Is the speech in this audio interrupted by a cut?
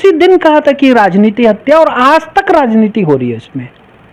no; 0 cuts

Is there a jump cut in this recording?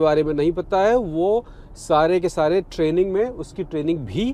no; 0 cuts

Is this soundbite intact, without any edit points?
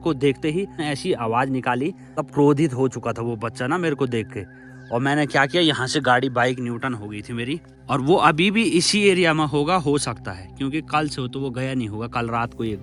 yes; 0 cuts

